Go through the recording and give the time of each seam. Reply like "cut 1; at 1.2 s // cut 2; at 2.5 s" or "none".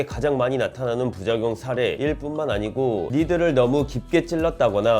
cut 1; at 3.1 s